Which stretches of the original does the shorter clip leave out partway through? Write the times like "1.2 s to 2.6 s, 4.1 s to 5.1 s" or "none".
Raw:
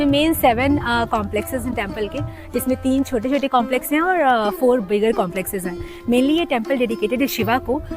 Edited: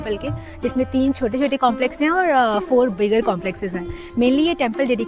none